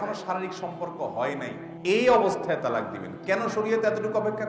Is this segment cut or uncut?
cut